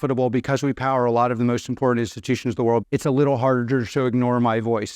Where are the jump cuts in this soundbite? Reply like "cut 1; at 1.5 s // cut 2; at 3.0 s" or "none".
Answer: cut 1; at 2.8 s